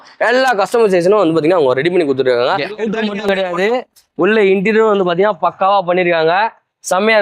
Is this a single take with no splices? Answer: no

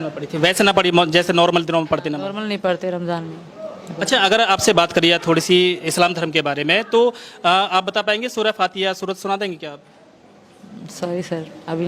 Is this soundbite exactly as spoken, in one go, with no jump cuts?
yes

